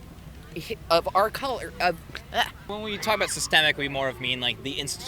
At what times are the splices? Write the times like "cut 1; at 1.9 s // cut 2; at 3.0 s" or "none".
cut 1; at 2.7 s